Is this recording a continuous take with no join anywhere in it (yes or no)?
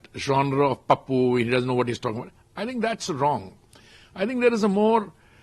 yes